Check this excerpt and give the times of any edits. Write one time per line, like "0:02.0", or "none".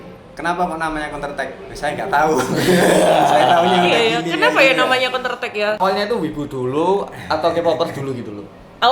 0:05.8